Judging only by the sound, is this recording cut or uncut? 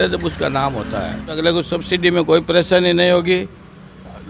cut